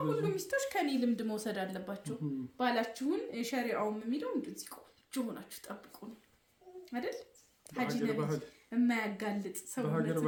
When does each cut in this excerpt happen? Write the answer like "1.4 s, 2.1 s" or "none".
none